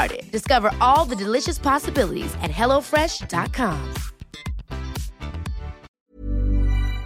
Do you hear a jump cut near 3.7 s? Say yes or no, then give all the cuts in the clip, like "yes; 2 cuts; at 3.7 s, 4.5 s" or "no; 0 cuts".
no; 1 cut; at 5.9 s